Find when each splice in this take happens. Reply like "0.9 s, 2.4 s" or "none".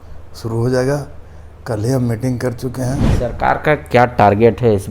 3.1 s